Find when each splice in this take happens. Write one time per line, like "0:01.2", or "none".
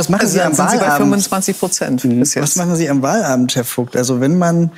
none